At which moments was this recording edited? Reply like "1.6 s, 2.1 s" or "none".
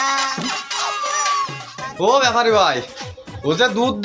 1.9 s